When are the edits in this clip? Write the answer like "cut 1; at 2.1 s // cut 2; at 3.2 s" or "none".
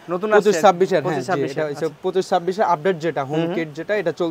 none